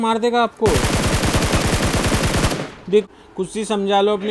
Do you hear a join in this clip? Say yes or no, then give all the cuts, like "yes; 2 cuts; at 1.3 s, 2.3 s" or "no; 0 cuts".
yes; 1 cut; at 3.0 s